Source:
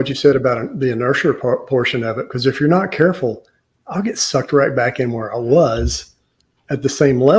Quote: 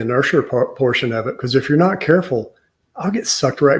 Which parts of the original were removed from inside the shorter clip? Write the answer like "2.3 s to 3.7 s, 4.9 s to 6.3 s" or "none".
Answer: none